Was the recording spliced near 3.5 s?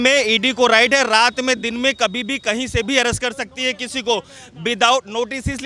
no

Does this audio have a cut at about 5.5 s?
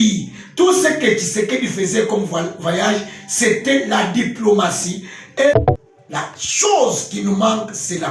yes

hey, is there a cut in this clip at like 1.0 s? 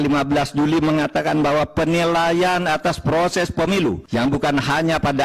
no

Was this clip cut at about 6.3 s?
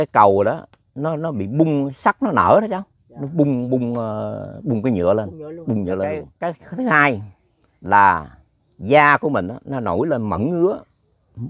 yes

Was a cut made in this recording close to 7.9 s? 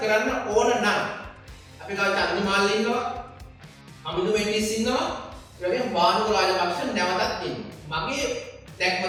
no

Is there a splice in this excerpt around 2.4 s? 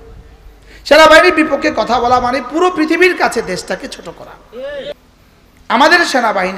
no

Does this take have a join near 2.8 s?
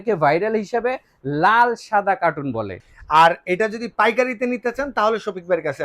yes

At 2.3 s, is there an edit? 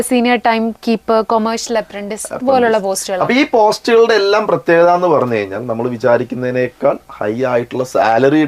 no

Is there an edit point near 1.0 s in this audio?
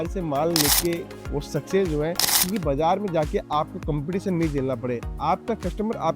no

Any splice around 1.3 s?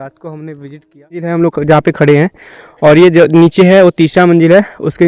yes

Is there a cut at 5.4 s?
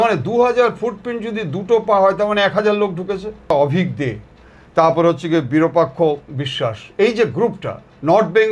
no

